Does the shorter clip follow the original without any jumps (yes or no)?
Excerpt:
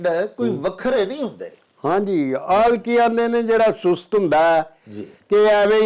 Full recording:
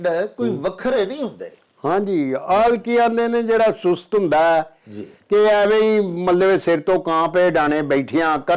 yes